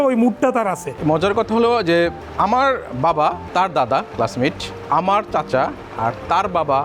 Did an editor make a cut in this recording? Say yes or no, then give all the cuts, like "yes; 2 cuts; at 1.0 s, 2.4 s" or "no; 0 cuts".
yes; 4 cuts; at 0.9 s, 2.2 s, 3.4 s, 4.7 s